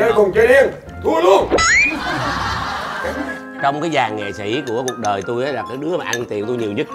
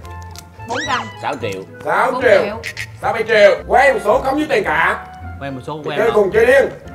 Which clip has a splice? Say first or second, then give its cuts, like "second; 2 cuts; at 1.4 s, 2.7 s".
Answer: first; 1 cut; at 3.1 s